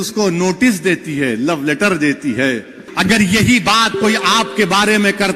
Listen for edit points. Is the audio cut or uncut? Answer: cut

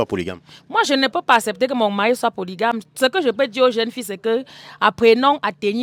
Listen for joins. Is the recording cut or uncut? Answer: uncut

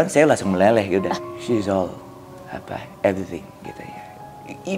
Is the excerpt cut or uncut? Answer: cut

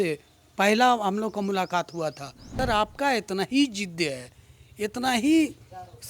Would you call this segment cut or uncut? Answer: cut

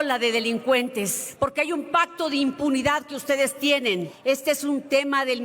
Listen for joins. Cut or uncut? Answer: cut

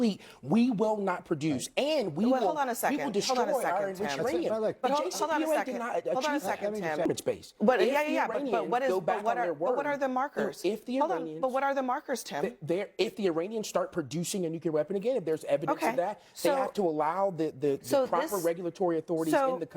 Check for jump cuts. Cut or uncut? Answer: cut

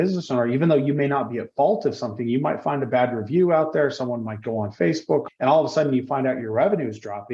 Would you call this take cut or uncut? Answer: cut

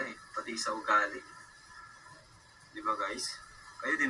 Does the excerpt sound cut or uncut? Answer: uncut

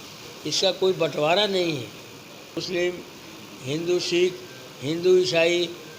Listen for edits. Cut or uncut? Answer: cut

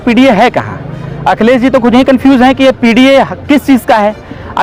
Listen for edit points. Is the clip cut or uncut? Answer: uncut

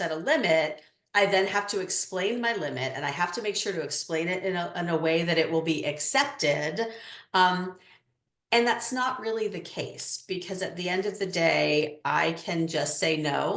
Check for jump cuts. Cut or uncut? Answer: uncut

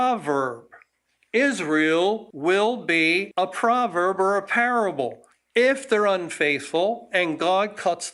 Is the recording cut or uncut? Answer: cut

